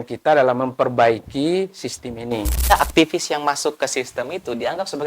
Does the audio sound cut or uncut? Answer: cut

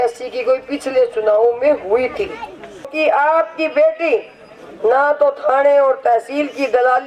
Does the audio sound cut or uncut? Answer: cut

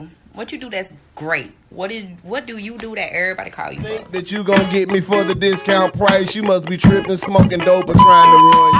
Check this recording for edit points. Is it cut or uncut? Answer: uncut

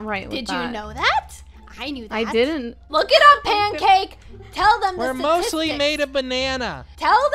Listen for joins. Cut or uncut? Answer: uncut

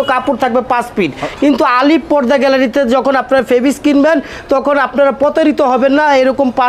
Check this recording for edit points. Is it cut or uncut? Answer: uncut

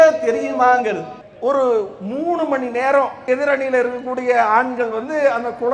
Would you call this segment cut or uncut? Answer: cut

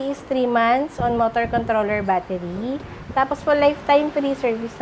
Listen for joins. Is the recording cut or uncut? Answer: uncut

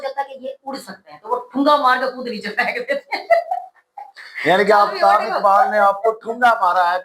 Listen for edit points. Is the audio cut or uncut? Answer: uncut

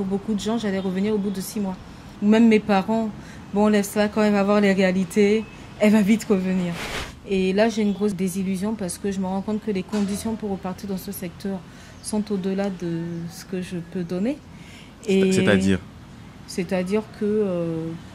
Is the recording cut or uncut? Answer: cut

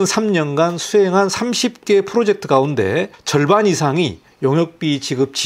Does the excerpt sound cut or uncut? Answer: uncut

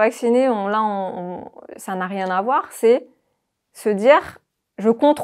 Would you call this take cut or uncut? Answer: uncut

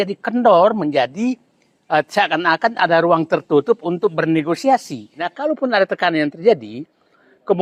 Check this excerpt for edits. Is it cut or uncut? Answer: cut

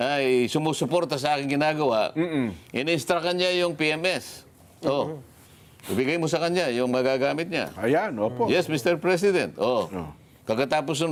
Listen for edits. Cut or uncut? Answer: uncut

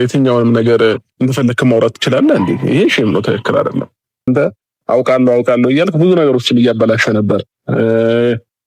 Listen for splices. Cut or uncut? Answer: cut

